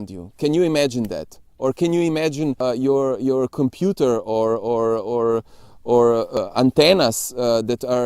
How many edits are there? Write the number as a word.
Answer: two